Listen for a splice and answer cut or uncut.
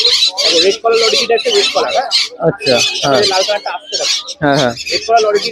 uncut